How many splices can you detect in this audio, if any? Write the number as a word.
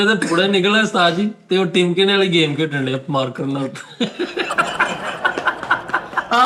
zero